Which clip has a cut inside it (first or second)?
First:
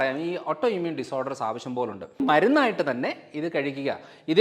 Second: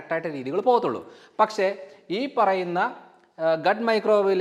first